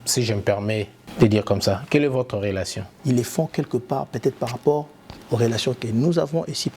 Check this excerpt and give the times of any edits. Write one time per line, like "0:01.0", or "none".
0:01.0
0:02.9